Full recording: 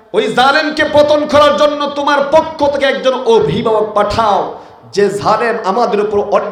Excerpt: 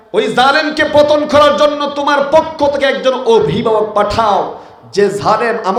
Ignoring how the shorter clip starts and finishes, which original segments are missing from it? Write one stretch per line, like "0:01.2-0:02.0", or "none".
none